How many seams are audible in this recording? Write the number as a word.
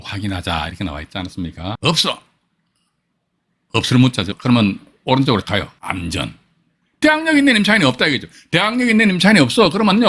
three